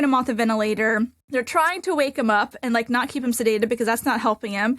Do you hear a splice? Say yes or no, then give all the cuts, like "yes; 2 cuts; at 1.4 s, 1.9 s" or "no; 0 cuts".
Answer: yes; 1 cut; at 1.2 s